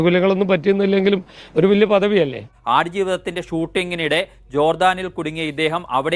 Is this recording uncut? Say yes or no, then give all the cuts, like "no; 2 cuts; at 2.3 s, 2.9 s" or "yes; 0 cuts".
no; 1 cut; at 2.5 s